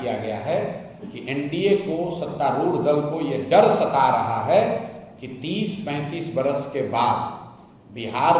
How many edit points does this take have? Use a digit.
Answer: 0